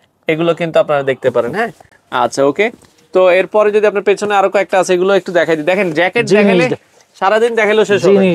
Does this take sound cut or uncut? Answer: uncut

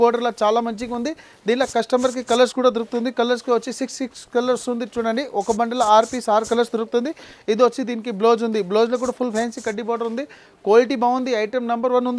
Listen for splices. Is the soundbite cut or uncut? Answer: uncut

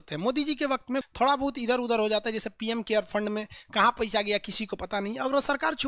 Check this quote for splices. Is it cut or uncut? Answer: cut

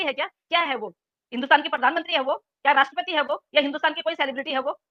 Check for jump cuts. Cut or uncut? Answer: uncut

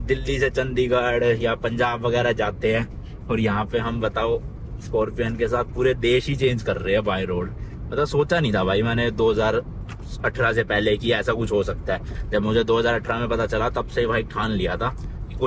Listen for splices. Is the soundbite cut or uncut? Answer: uncut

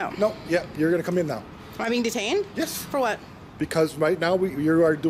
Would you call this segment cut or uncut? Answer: uncut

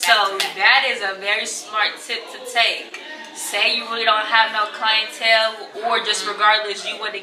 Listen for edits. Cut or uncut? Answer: uncut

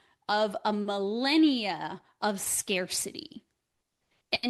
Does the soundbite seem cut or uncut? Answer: uncut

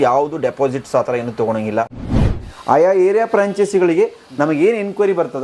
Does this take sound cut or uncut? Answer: cut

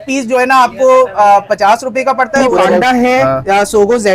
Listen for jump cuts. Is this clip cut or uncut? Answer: cut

